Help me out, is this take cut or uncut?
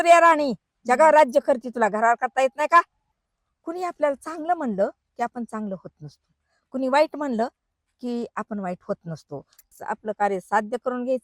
cut